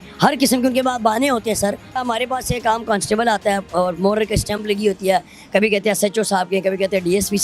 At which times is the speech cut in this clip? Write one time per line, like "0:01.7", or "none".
0:01.9